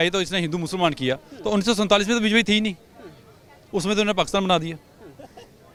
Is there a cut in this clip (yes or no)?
no